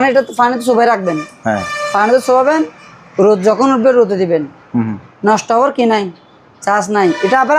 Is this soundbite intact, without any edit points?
yes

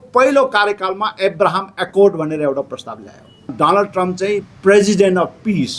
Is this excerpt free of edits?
no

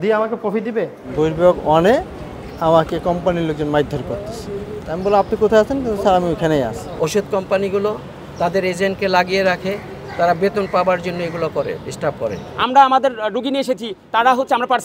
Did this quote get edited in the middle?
yes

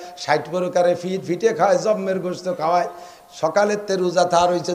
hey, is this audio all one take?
yes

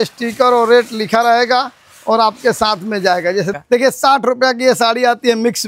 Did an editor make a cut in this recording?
yes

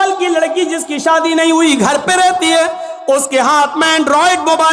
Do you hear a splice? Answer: no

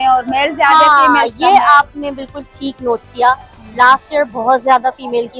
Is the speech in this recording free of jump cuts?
yes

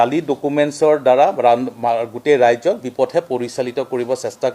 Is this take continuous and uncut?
no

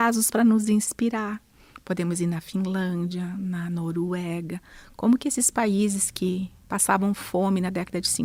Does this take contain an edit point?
no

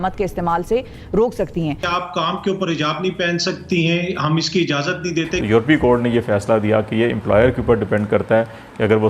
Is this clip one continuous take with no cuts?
no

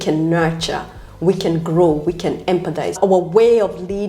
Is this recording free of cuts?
no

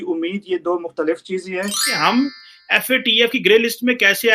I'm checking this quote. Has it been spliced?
yes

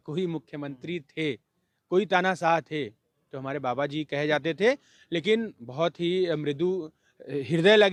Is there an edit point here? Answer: no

